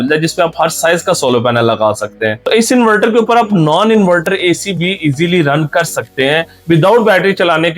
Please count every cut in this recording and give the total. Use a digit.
2